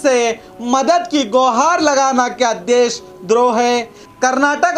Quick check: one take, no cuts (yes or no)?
yes